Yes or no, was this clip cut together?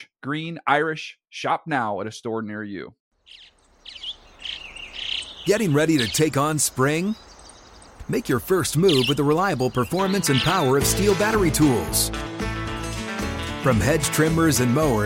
yes